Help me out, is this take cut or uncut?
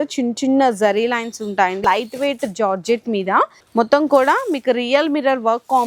cut